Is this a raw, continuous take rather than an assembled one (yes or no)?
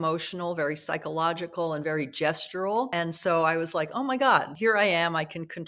no